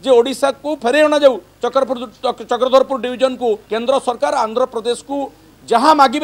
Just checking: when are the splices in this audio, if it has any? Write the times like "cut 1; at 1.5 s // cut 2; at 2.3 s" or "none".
cut 1; at 3.7 s